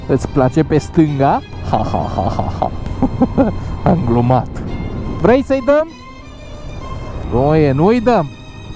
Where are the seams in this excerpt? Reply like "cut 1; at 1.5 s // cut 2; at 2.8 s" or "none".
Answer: cut 1; at 5.1 s